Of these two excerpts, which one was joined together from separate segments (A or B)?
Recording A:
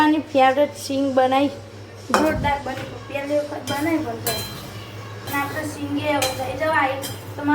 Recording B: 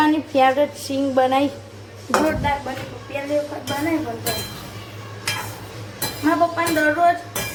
A